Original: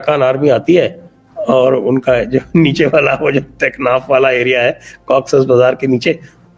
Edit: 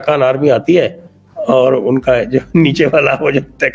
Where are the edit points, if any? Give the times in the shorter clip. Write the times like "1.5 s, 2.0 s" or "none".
none